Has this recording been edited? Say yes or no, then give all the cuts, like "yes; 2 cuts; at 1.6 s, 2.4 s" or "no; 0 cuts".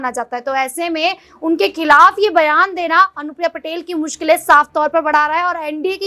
no; 0 cuts